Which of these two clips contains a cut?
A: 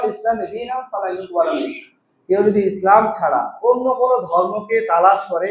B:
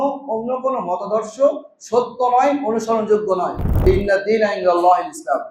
B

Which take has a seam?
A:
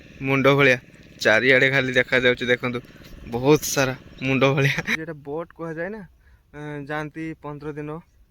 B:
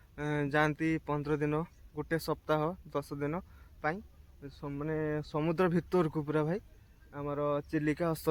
A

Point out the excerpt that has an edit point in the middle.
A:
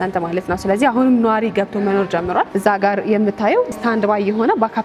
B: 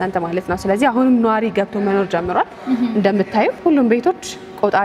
A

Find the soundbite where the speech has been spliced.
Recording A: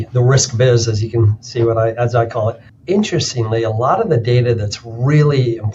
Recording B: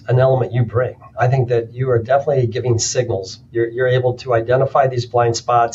A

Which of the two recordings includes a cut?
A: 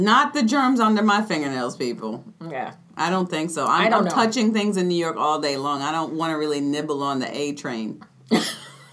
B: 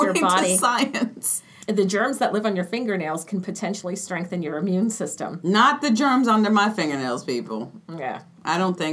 B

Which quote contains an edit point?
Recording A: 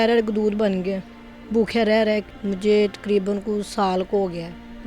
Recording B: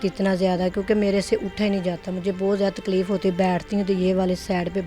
A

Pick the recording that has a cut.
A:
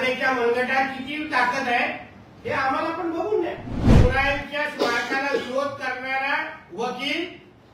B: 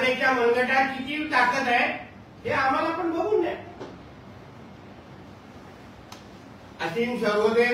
A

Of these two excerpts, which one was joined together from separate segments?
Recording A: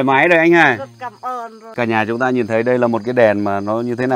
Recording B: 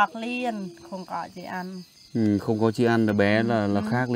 A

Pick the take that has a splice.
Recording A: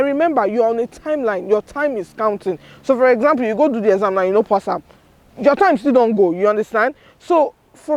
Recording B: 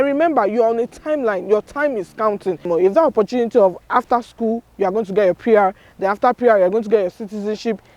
B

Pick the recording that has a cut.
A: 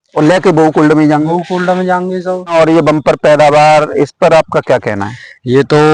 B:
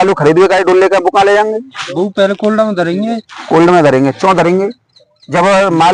A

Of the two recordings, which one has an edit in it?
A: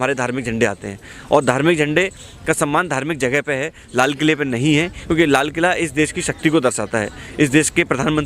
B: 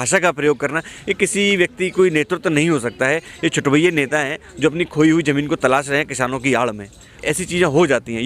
B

